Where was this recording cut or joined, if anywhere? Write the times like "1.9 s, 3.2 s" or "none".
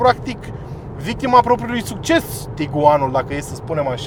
none